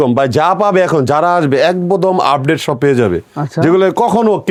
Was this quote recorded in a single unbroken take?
yes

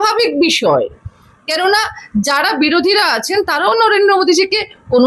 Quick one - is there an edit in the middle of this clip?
no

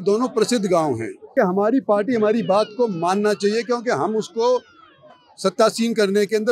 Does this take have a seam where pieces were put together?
yes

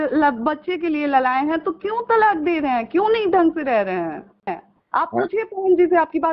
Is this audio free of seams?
no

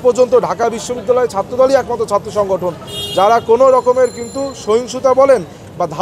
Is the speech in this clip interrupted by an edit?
no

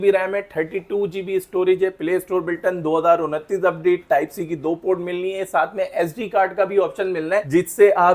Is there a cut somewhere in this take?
no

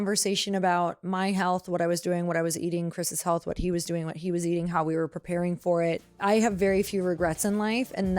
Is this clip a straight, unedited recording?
no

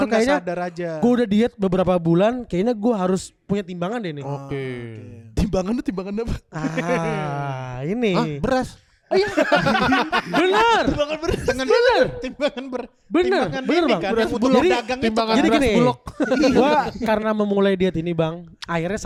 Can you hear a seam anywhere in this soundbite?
no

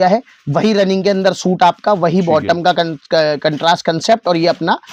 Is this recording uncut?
yes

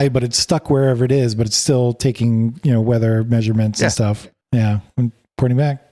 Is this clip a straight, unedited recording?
yes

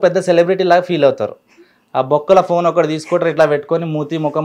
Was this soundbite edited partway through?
no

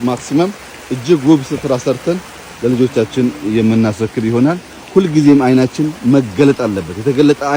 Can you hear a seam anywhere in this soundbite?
no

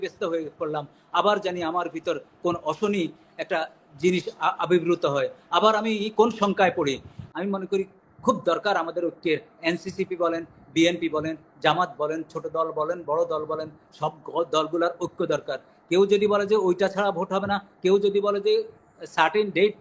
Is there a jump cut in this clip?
yes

